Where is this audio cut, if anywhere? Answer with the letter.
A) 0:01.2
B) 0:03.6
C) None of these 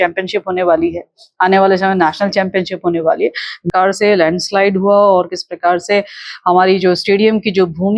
B